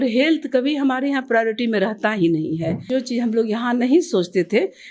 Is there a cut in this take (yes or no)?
yes